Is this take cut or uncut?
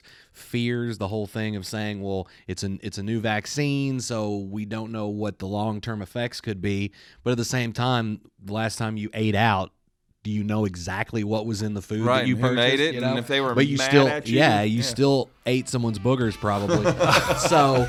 uncut